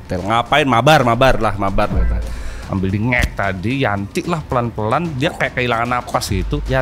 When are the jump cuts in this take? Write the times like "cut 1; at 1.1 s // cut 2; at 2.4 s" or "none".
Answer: cut 1; at 2.7 s